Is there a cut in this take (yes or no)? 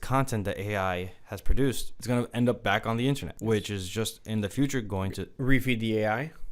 yes